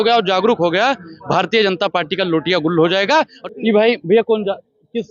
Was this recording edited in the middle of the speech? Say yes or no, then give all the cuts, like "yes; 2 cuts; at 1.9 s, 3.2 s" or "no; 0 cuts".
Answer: yes; 1 cut; at 3.4 s